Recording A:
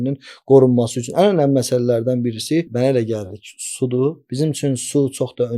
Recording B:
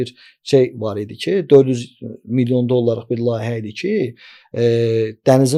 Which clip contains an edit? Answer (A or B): A